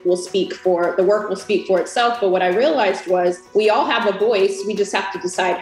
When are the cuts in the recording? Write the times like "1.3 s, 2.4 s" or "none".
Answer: 3.4 s

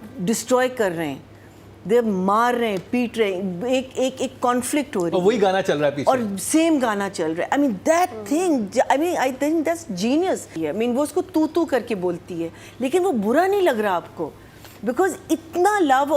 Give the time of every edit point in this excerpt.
10.5 s

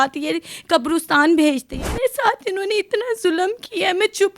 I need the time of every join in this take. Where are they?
1.7 s

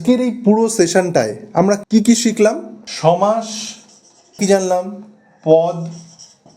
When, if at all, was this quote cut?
4.4 s

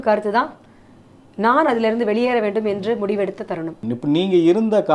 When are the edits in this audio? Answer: 3.8 s

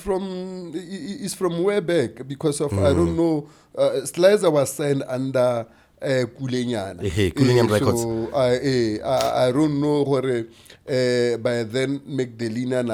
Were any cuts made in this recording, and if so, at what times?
none

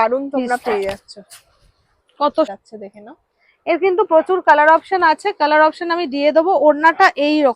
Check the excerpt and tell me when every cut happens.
2.5 s

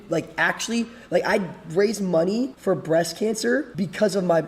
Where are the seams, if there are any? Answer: 2.5 s, 3.7 s

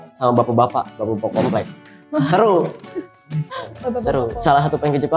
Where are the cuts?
4.3 s

